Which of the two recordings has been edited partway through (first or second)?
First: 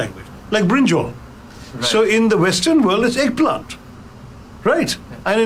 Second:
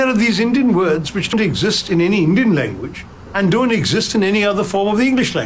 second